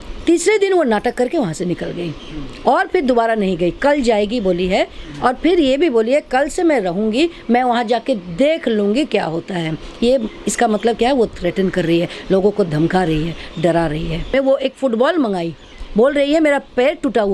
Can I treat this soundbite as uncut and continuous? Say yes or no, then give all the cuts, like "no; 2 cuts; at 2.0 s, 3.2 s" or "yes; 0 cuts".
no; 1 cut; at 14.3 s